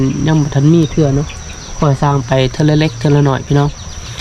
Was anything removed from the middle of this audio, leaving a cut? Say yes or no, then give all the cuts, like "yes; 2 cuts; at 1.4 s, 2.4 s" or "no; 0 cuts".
no; 0 cuts